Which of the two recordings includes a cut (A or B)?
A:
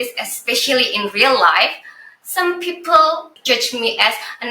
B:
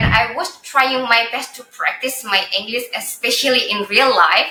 A